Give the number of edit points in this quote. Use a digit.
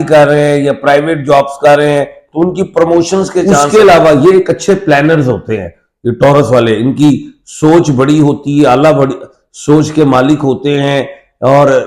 1